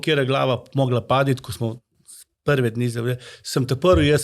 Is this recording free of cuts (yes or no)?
yes